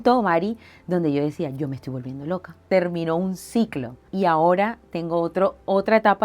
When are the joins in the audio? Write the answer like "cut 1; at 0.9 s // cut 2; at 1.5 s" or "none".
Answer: cut 1; at 2.7 s // cut 2; at 4.0 s